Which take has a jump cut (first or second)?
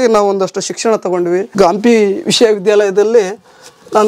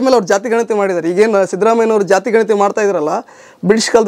first